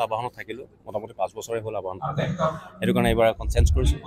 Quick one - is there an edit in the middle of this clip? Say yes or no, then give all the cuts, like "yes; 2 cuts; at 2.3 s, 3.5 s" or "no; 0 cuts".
no; 0 cuts